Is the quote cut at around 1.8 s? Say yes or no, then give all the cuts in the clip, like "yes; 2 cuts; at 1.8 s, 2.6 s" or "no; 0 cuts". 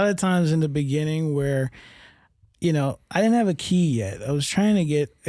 no; 0 cuts